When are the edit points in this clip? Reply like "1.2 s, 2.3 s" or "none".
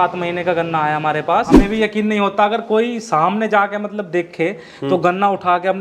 1.6 s